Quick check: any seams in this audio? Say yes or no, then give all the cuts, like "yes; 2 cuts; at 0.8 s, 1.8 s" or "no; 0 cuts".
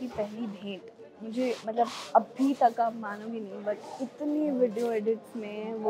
no; 0 cuts